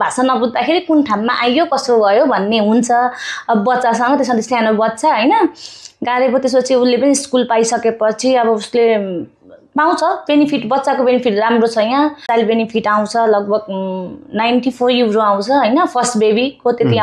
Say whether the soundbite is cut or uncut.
cut